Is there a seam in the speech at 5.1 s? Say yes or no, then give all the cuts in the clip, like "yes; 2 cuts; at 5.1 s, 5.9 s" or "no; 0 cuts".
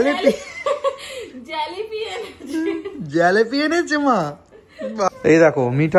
yes; 1 cut; at 5.1 s